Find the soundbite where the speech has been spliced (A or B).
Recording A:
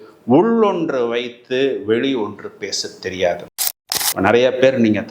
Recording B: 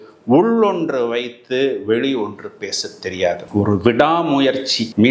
A